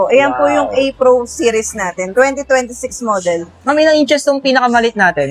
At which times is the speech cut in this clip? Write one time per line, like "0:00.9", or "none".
none